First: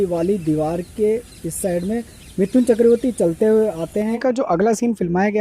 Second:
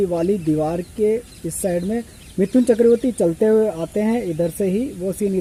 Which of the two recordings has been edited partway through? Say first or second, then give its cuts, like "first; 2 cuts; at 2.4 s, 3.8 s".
first; 1 cut; at 4.2 s